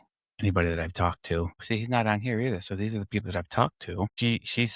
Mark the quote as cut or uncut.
uncut